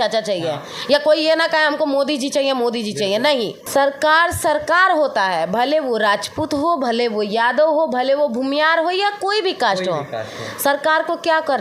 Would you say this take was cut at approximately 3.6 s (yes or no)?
yes